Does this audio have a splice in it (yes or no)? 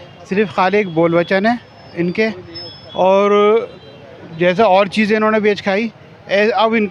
no